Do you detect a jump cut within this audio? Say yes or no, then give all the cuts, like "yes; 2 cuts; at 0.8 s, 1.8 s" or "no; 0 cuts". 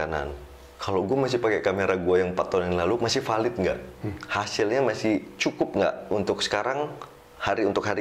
no; 0 cuts